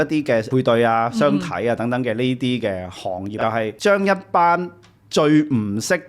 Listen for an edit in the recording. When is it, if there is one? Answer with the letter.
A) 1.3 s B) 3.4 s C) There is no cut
B